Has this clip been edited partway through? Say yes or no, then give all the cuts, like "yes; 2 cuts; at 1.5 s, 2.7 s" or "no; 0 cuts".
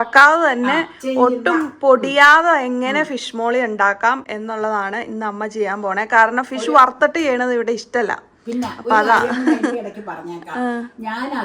no; 0 cuts